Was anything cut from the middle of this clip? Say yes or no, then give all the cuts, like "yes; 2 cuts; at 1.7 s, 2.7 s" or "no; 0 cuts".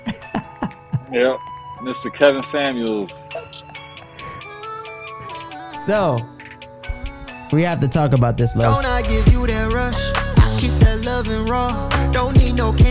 yes; 1 cut; at 8.7 s